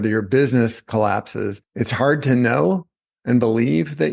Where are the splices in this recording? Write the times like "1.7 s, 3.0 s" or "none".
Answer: 1.6 s

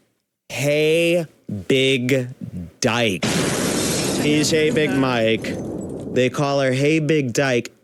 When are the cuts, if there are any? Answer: none

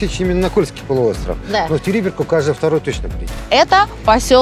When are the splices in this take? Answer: 3.4 s

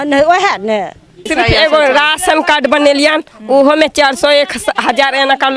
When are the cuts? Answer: 1.2 s

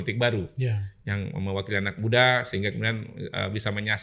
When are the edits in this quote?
none

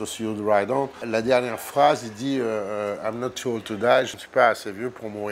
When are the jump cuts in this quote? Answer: 1.0 s, 4.2 s

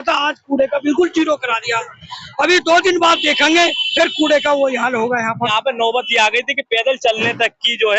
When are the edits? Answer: 5.4 s

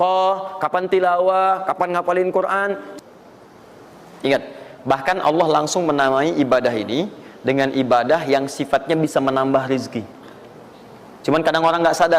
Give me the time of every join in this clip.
2.9 s

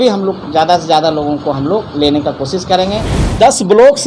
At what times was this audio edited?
3.1 s

